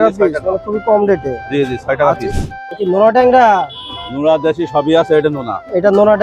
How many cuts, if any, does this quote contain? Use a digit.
1